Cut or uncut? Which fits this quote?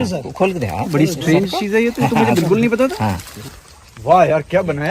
cut